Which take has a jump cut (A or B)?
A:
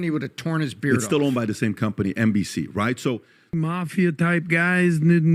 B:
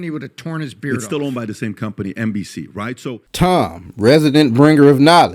A